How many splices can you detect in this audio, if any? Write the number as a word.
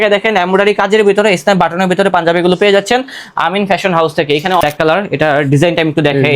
one